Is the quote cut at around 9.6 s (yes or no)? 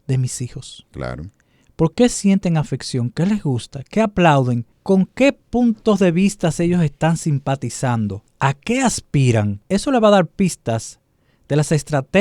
yes